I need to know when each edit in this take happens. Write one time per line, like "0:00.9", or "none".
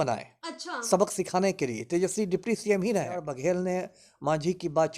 0:03.3